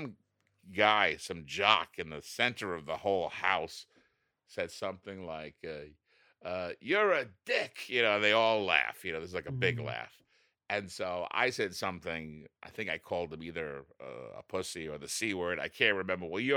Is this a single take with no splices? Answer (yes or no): yes